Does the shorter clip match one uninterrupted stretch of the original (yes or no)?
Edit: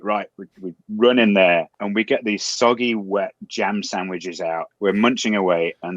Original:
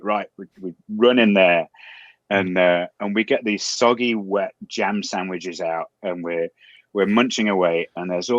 no